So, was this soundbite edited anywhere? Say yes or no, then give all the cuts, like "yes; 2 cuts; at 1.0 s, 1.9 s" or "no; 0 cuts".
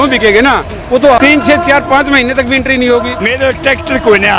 yes; 1 cut; at 3.2 s